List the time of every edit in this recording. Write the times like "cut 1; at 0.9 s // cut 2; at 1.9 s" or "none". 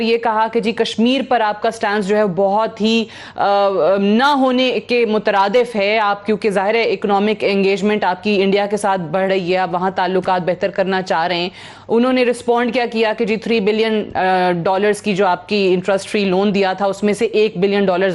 none